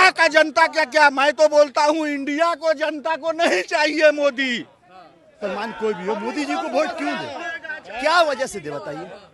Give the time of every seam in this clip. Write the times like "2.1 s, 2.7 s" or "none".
5.4 s